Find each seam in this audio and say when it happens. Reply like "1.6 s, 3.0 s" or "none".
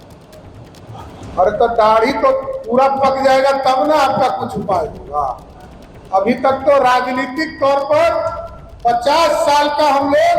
none

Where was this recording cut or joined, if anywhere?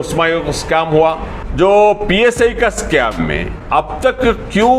1.4 s, 3.5 s

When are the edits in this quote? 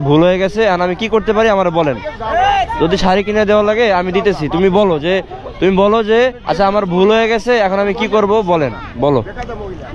none

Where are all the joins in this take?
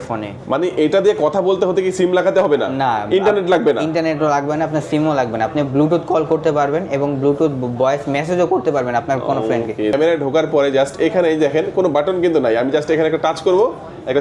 9.9 s

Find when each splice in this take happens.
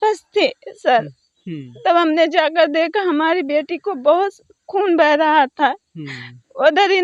none

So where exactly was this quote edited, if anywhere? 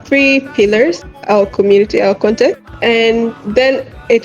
1.1 s, 2.7 s

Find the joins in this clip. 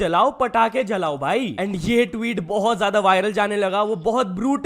none

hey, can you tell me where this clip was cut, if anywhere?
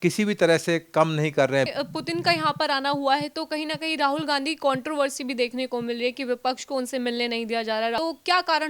1.7 s, 8.0 s

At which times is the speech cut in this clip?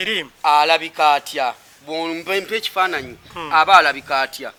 none

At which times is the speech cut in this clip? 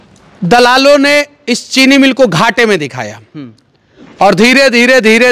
none

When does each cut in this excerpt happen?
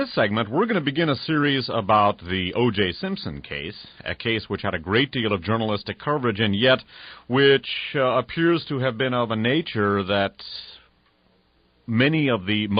none

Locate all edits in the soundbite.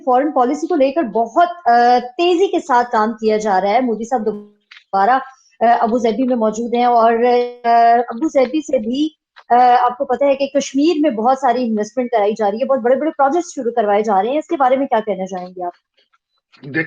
none

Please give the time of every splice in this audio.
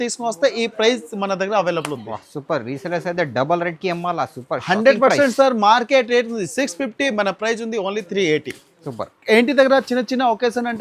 9.1 s

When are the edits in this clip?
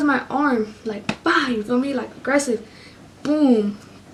none

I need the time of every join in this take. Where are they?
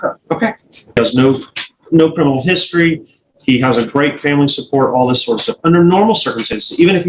1.0 s

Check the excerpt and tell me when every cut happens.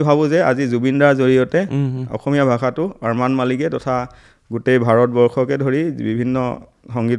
none

